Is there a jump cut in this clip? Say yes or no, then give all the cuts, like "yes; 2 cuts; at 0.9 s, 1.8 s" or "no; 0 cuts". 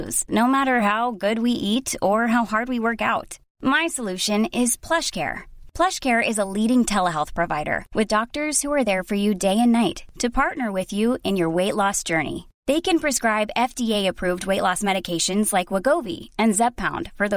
no; 0 cuts